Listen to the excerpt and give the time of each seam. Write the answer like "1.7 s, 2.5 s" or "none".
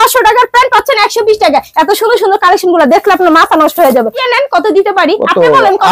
1.7 s, 4.3 s